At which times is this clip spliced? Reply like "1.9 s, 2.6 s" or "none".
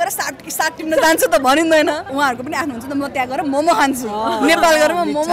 2.1 s